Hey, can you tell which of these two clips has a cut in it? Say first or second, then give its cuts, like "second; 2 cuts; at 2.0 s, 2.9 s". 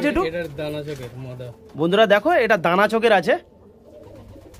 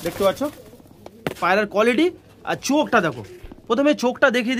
second; 1 cut; at 1.4 s